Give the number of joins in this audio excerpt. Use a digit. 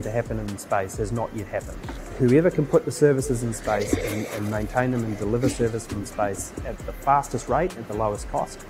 1